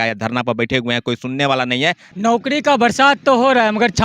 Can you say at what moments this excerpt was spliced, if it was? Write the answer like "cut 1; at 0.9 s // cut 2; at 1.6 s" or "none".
cut 1; at 2.1 s

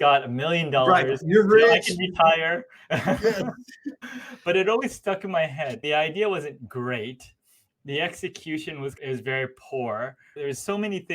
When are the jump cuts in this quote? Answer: cut 1; at 3.8 s // cut 2; at 5.8 s

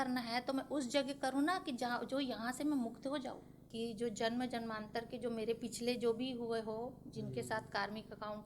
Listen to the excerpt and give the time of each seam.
cut 1; at 3.6 s

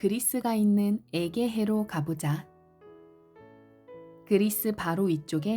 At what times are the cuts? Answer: cut 1; at 2.5 s // cut 2; at 4.2 s

